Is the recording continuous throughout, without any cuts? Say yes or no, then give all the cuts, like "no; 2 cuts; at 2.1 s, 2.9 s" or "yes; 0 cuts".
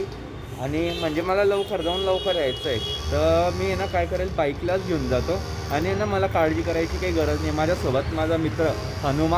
yes; 0 cuts